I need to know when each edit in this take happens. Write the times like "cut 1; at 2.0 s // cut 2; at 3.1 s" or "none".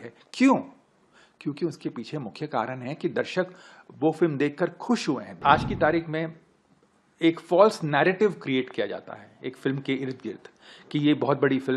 cut 1; at 5.4 s